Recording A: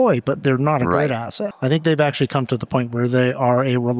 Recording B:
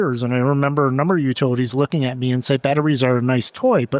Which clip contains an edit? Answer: A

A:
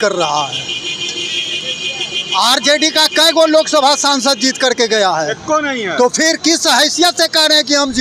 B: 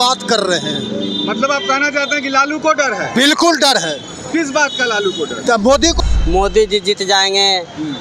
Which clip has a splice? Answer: B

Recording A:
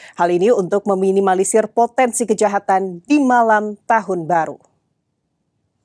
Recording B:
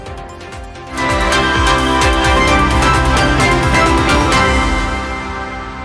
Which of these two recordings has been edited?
B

